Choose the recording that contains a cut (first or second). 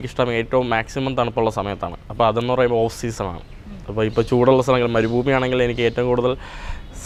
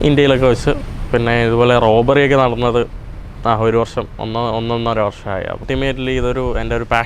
second